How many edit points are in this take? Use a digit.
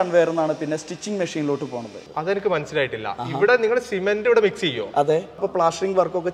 2